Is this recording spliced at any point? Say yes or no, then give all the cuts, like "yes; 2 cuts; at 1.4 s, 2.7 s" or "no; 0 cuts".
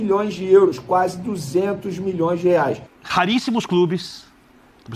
yes; 1 cut; at 2.9 s